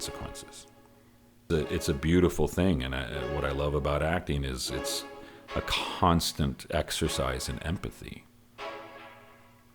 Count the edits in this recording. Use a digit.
1